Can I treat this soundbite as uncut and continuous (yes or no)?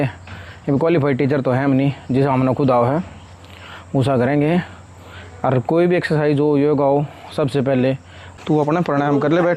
no